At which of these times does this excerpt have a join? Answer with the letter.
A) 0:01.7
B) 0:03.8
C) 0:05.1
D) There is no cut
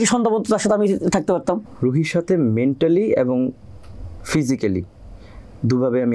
A